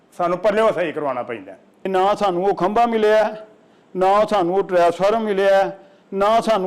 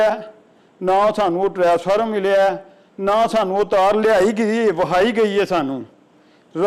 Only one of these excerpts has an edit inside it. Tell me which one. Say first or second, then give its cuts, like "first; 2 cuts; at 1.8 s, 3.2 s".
first; 1 cut; at 1.9 s